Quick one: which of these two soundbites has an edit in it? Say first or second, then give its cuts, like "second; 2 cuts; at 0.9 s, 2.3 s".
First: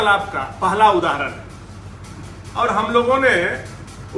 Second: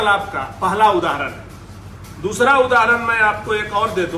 first; 1 cut; at 2.0 s